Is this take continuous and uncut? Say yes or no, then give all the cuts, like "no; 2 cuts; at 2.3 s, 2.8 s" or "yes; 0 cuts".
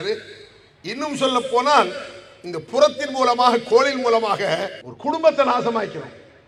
yes; 0 cuts